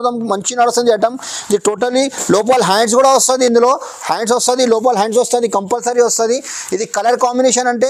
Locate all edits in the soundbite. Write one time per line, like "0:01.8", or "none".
none